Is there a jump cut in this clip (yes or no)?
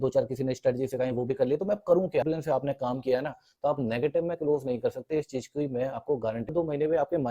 yes